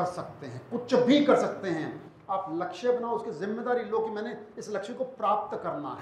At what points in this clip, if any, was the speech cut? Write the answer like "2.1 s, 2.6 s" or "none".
none